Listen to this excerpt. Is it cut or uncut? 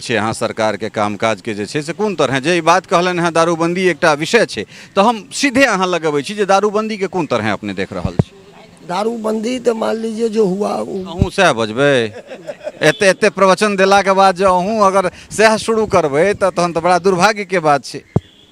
uncut